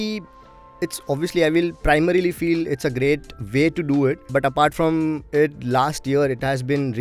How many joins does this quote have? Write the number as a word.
one